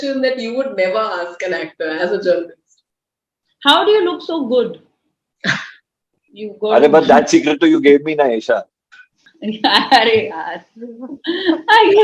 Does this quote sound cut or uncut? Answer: uncut